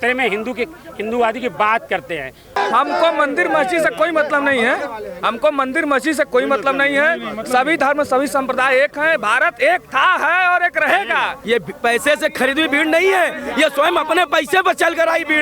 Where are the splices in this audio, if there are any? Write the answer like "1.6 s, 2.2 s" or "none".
2.6 s, 11.4 s

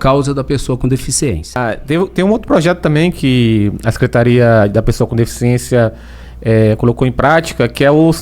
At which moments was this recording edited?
1.6 s

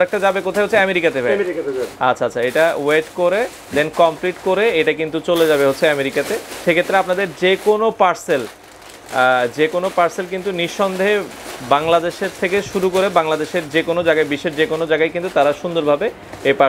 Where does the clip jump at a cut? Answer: none

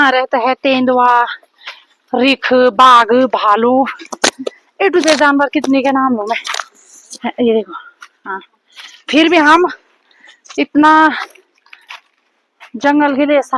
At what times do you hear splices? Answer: none

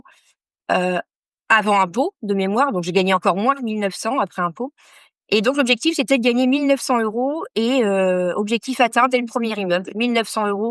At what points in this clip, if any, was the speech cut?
none

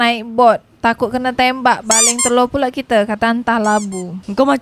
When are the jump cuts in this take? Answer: none

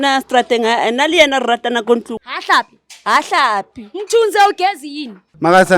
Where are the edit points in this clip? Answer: 2.2 s

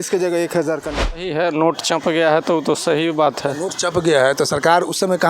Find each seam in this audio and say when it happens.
1.1 s

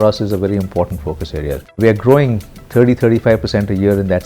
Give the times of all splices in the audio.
1.8 s

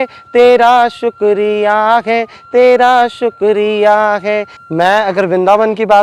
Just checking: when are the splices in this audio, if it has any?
4.6 s

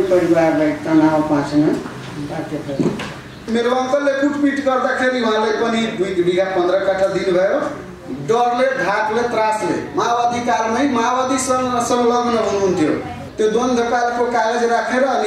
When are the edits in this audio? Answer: 3.4 s, 13.2 s

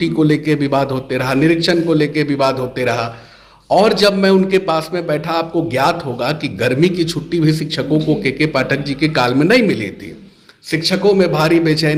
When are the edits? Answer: none

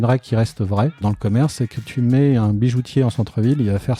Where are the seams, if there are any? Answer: 1.0 s, 1.9 s

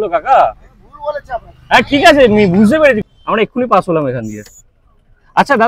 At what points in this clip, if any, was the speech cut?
3.1 s

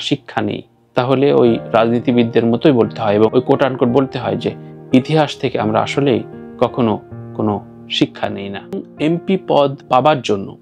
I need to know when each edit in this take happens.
8.9 s

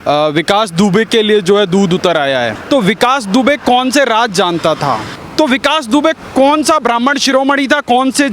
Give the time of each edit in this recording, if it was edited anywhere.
2.6 s, 5.2 s

